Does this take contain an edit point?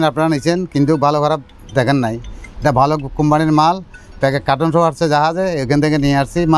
no; 0 cuts

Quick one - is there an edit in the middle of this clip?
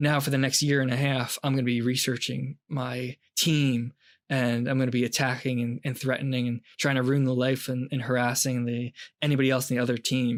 no; 0 cuts

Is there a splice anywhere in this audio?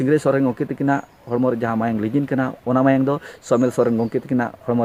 no; 0 cuts

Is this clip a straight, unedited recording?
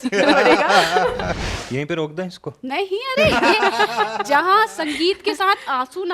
no; 1 cut; at 1.5 s

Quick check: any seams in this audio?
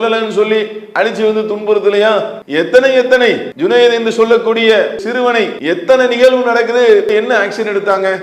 yes; 4 cuts; at 2.4 s, 3.5 s, 5.1 s, 7.1 s

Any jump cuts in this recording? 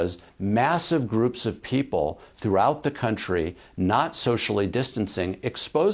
no; 0 cuts

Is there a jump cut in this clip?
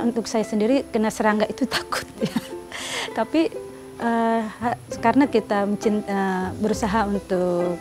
no; 0 cuts

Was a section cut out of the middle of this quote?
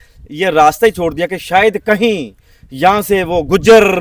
no; 0 cuts

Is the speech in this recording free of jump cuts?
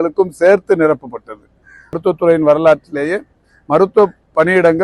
no; 1 cut; at 2.0 s

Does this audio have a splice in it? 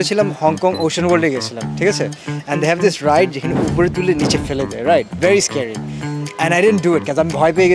no; 0 cuts

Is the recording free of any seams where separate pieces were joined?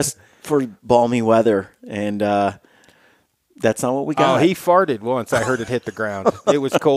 yes; 0 cuts

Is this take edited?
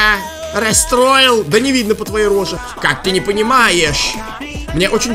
yes; 1 cut; at 2.6 s

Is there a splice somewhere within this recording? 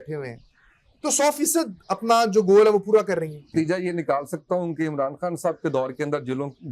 yes; 1 cut; at 3.5 s

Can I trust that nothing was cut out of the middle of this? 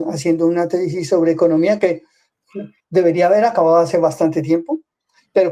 yes; 0 cuts

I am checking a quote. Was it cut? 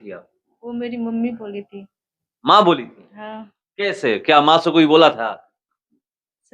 no; 0 cuts

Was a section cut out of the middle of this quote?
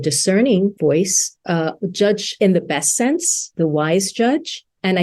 yes; 3 cuts; at 0.8 s, 2.3 s, 3.5 s

